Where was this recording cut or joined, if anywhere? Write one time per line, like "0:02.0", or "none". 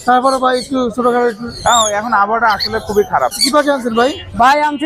0:03.4